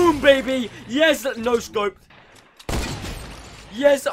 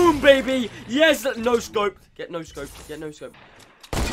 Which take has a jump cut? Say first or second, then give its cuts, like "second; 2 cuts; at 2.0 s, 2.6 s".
first; 1 cut; at 2.1 s